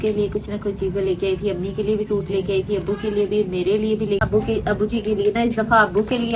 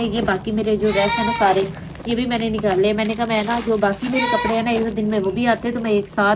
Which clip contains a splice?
first; 1 cut; at 4.3 s

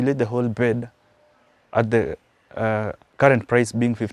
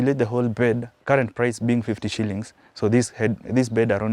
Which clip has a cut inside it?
second; 1 cut; at 0.9 s

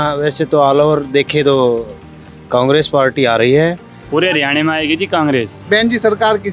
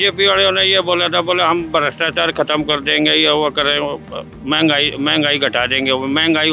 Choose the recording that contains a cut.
first; 2 cuts; at 3.9 s, 5.6 s

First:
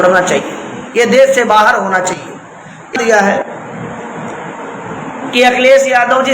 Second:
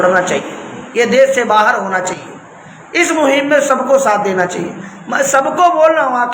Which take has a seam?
first; 1 cut; at 2.9 s

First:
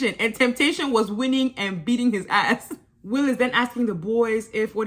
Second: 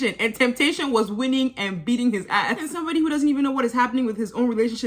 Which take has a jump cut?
second; 1 cut; at 2.7 s

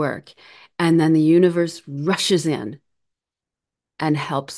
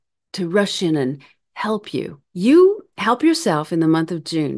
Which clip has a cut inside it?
second; 1 cut; at 2.2 s

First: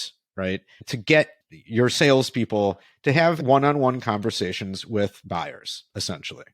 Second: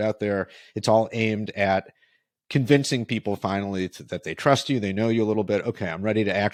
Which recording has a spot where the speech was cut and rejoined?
first; 2 cuts; at 1.2 s, 3.4 s

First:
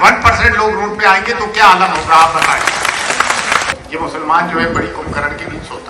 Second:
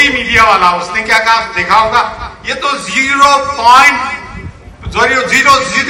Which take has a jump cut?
first; 1 cut; at 3.7 s

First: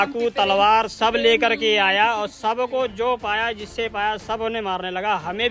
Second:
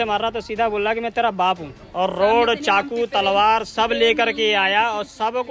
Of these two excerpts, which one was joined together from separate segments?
second; 1 cut; at 1.8 s

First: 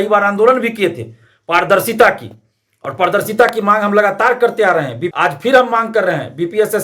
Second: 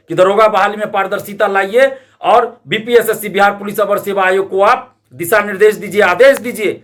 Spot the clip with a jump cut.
first; 1 cut; at 5.0 s

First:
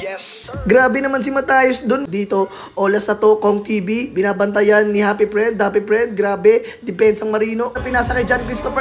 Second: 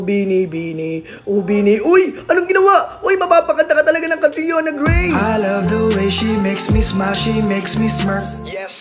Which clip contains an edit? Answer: first; 2 cuts; at 2.0 s, 7.8 s

